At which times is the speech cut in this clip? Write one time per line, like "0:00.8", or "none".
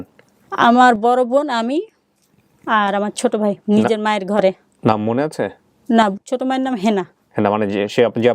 0:06.1